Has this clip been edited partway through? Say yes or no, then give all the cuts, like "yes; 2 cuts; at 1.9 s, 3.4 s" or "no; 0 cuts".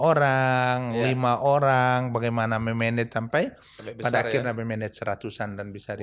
no; 0 cuts